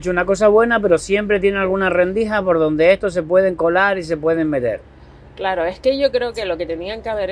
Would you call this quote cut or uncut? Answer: uncut